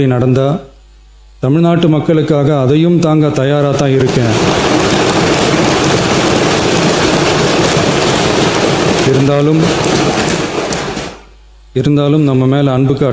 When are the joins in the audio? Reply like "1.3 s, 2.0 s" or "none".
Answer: none

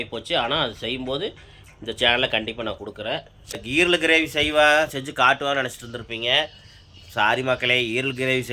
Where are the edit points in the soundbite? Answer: 3.6 s

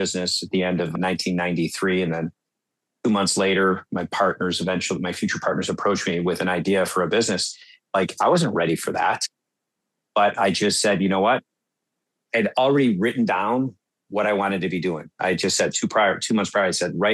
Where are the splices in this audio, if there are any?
0.9 s

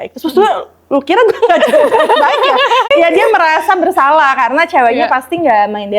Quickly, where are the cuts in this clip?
2.9 s

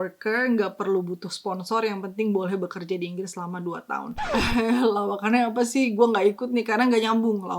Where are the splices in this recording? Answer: 4.2 s

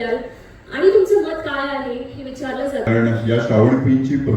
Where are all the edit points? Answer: 2.9 s

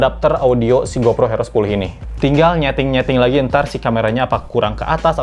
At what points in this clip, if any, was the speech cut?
2.0 s

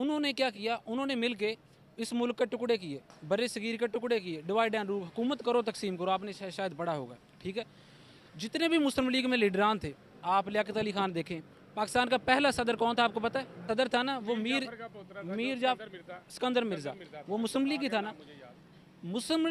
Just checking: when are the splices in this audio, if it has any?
none

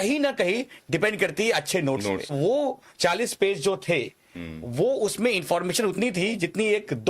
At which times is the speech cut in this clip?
2.3 s

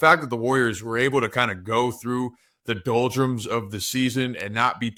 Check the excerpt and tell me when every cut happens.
none

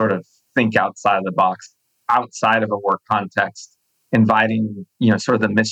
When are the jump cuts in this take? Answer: 1.9 s, 4.8 s

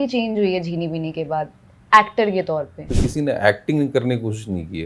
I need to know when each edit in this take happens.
3.0 s

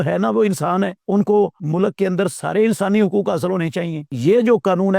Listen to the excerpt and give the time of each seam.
1.0 s, 1.6 s, 4.1 s

